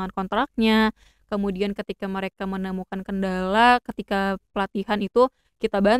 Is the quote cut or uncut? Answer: uncut